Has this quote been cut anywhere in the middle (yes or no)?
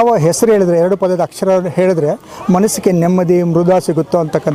no